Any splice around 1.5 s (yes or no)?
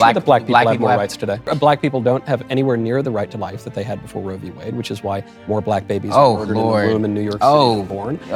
yes